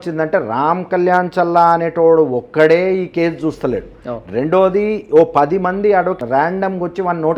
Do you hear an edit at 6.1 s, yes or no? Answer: yes